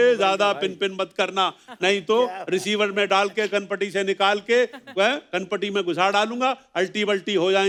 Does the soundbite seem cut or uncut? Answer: uncut